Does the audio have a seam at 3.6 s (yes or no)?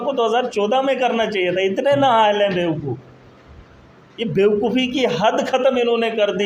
no